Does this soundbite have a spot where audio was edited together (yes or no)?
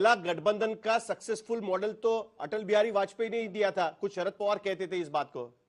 no